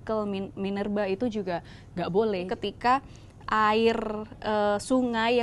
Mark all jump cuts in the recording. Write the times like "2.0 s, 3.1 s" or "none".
2.5 s